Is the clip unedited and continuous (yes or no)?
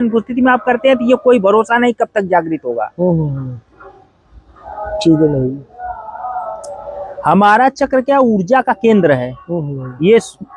yes